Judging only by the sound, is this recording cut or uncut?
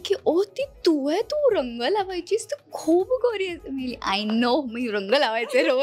uncut